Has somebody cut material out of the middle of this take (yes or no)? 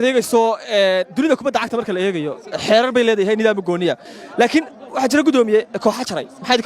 yes